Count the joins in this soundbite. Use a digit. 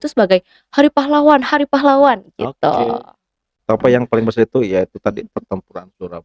1